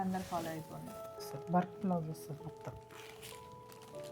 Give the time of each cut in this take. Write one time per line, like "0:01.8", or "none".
0:01.1